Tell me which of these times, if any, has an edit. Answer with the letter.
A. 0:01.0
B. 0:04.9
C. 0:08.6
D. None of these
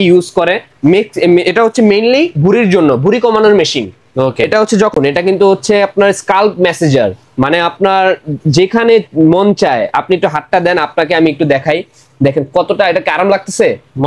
B